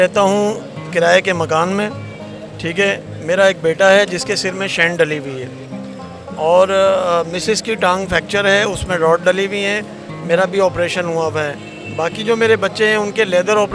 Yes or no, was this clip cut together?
no